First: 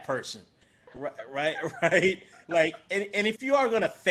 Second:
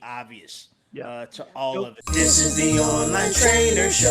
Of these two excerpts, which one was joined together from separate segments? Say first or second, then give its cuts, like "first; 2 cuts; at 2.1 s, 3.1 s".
second; 1 cut; at 2.1 s